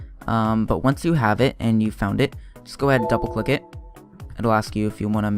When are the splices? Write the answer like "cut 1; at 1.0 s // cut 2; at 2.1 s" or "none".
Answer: cut 1; at 1.9 s

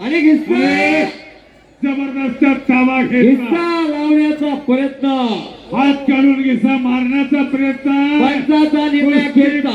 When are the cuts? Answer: none

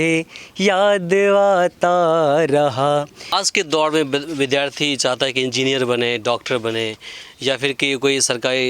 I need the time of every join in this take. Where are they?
cut 1; at 3.2 s

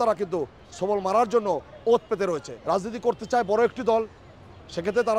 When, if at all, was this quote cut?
cut 1; at 2.5 s

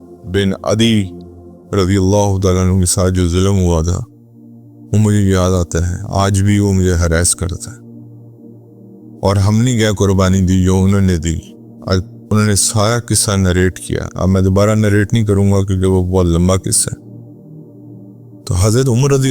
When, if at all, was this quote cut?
none

